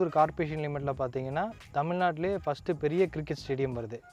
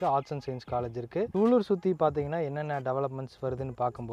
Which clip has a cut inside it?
second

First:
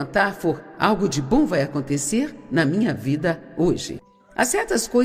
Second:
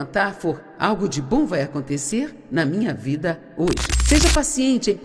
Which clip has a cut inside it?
second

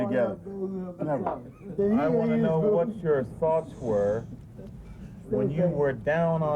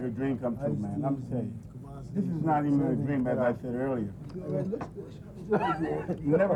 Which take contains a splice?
first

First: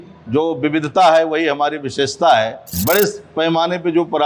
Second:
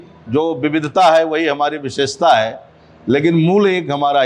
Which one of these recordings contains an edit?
first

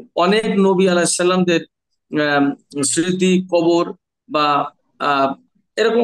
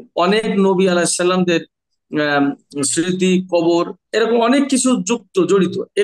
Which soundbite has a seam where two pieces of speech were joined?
second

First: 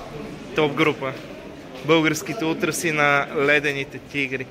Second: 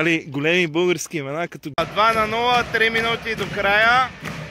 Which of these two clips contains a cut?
second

